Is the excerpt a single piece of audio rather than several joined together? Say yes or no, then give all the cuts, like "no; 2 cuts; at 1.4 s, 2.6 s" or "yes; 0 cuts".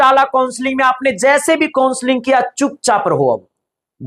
yes; 0 cuts